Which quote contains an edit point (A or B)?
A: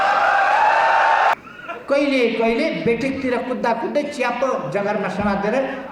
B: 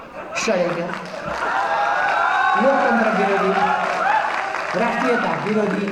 A